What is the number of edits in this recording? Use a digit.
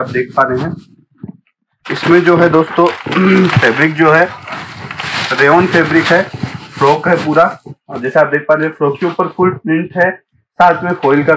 1